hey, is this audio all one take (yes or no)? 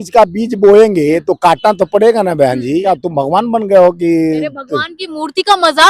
no